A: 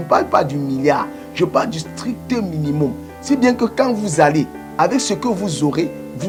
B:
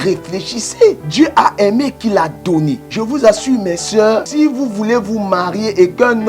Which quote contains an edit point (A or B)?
B